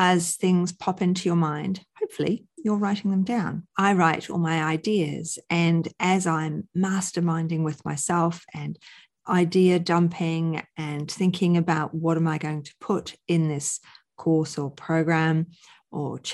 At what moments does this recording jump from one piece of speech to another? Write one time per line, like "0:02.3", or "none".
0:03.6